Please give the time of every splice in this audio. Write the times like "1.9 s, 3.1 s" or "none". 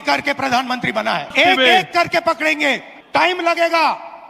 1.3 s, 2.9 s